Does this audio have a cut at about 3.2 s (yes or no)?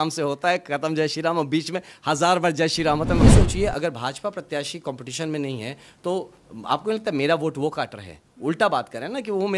yes